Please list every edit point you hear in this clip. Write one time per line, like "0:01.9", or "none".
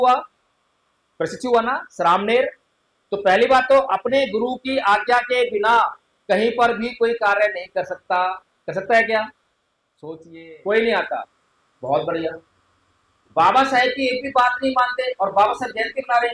0:10.1